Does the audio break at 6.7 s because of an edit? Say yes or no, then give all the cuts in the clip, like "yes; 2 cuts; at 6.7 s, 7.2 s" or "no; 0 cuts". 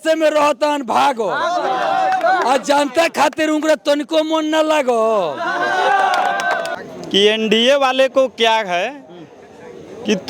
yes; 1 cut; at 6.7 s